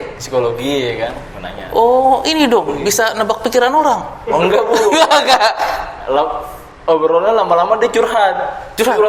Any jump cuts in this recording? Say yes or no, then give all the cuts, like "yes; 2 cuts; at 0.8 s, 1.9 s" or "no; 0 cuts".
no; 0 cuts